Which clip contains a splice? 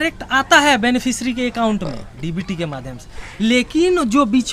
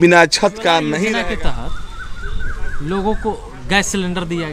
second; 1 cut; at 1.1 s

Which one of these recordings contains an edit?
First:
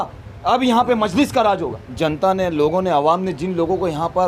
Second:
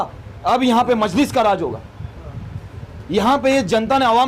first; 1 cut; at 1.8 s

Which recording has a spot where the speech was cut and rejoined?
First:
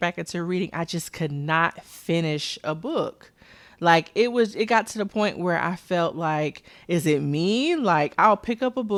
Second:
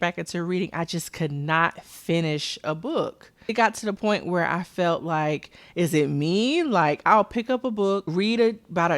second; 2 cuts; at 3.5 s, 8.1 s

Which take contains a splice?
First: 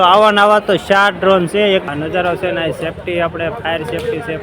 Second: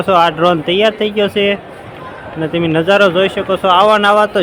first; 1 cut; at 1.8 s

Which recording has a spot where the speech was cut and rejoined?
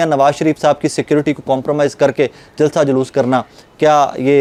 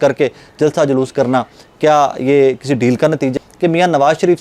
second; 1 cut; at 3.3 s

